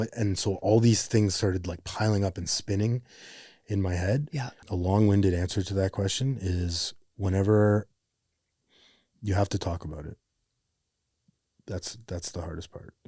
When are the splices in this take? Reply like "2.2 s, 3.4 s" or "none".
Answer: 4.6 s